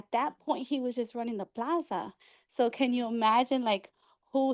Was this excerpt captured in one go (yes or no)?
yes